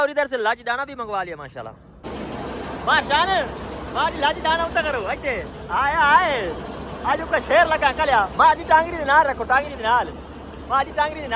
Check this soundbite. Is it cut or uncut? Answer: cut